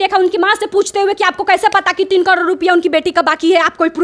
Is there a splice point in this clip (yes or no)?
no